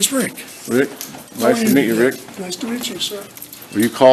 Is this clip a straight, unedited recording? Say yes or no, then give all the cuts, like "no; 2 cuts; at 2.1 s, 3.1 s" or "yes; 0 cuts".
yes; 0 cuts